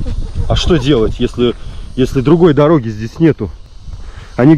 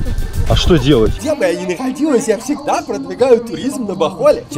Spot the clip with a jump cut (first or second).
second